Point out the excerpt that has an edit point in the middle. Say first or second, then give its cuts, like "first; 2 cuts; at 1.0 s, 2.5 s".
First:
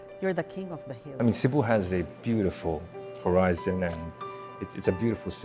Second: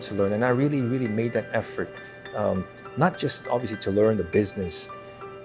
first; 1 cut; at 1.1 s